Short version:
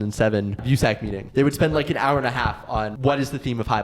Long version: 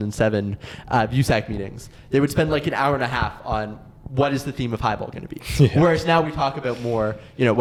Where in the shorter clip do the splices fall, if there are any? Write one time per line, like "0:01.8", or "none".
0:00.8
0:02.9